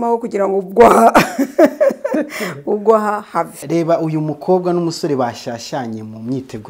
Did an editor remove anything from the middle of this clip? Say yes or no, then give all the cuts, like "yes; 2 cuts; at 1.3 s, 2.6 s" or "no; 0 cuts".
yes; 1 cut; at 3.6 s